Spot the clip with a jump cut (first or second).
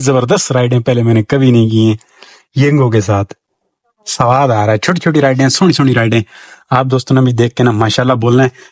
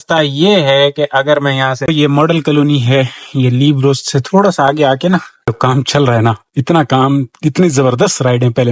second